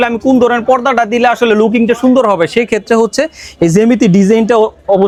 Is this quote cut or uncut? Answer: uncut